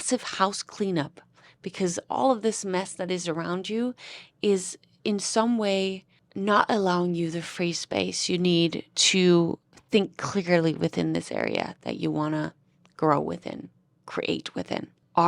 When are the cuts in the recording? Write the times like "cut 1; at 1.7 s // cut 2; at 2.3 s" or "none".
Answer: none